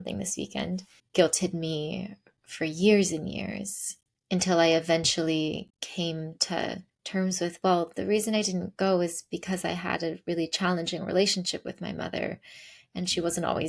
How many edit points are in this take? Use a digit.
3